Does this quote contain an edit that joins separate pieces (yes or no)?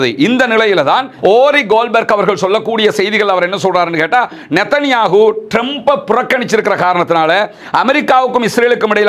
yes